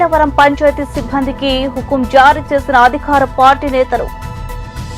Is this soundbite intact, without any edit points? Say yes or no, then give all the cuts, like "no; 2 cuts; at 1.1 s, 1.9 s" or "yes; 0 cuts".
yes; 0 cuts